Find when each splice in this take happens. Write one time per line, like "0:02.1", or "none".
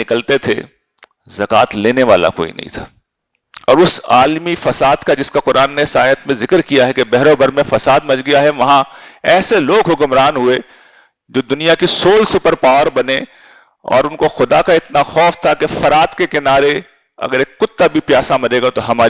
none